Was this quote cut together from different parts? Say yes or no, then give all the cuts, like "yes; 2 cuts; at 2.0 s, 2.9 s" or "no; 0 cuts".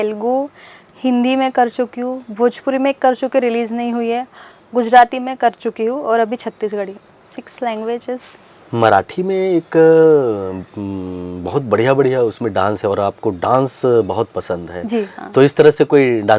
no; 0 cuts